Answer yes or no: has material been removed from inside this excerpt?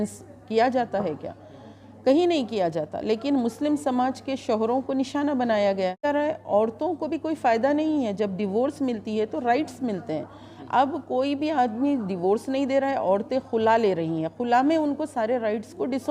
yes